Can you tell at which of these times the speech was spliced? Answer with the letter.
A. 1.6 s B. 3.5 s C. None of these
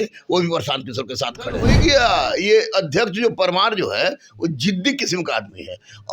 A